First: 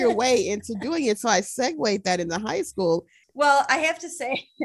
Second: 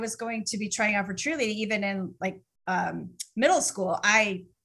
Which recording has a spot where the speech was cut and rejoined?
first; 1 cut; at 3.2 s

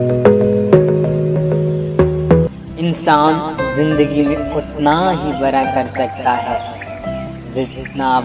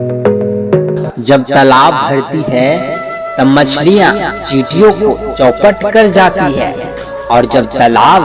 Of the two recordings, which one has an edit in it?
second; 1 cut; at 1.0 s

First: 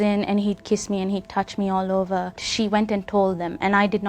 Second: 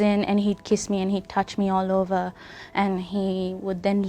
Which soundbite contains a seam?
first; 1 cut; at 2.4 s

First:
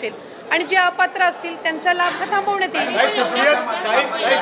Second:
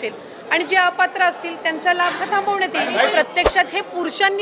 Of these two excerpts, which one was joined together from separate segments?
second; 1 cut; at 3.1 s

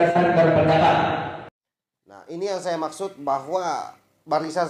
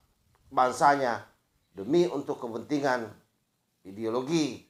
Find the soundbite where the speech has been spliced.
first; 1 cut; at 1.6 s

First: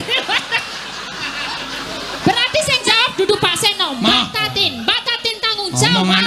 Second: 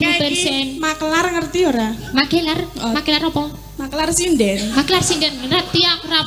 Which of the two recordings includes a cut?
first; 1 cut; at 2.8 s

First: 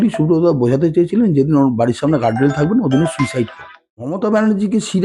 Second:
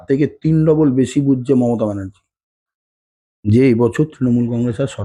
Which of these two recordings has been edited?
first; 1 cut; at 4.1 s

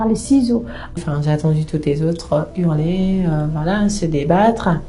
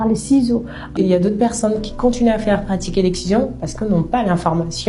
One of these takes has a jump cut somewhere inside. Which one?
first; 1 cut; at 1.0 s

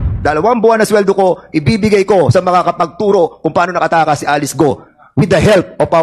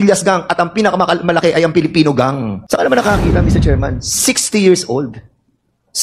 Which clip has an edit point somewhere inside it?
second; 1 cut; at 2.5 s

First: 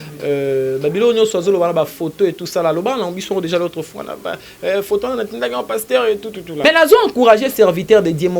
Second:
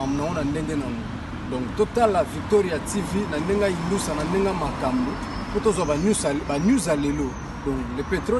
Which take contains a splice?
first; 1 cut; at 6.6 s

